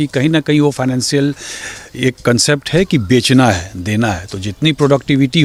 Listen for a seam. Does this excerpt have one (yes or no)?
no